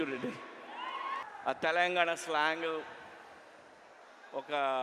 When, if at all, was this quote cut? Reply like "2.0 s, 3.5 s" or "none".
1.2 s